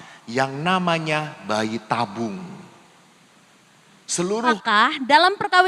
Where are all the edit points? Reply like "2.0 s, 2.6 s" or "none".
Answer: 4.6 s